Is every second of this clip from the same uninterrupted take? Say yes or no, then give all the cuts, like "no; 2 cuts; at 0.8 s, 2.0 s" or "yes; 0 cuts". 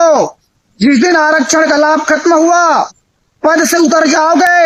yes; 0 cuts